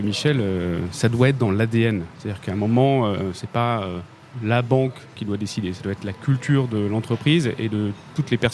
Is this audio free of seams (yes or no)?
yes